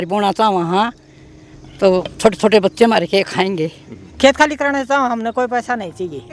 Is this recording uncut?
yes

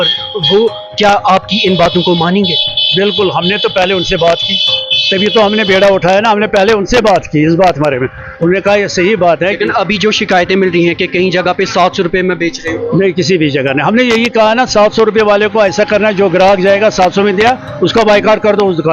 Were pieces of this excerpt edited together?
no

